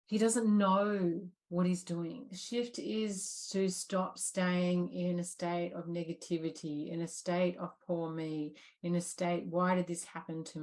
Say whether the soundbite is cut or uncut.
cut